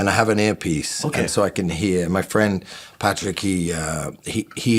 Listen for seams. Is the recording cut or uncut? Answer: uncut